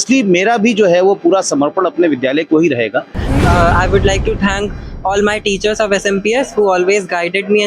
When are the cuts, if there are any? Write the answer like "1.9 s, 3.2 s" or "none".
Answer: 3.4 s